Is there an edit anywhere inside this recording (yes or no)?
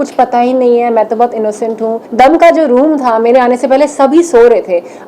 yes